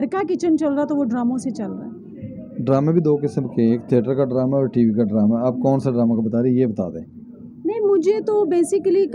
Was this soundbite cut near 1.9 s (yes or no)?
no